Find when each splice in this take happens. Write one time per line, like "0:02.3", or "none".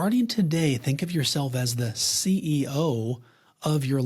none